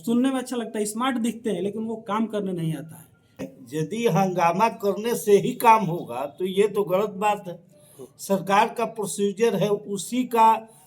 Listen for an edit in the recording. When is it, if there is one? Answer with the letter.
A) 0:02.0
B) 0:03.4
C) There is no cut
B